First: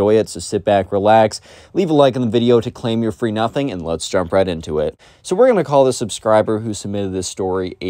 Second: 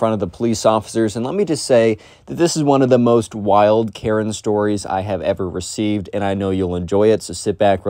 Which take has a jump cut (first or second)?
first